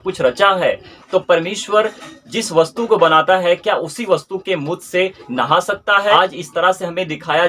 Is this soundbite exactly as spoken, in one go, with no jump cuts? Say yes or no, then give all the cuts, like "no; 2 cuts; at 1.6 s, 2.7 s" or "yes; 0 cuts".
no; 1 cut; at 6.1 s